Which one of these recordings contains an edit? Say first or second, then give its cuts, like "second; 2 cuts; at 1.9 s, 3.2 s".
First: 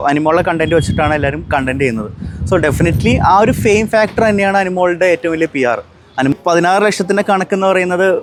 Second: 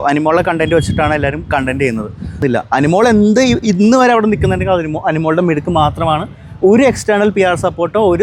second; 1 cut; at 2.4 s